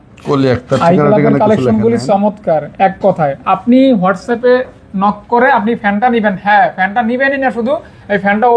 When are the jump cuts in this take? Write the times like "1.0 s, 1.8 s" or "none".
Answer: none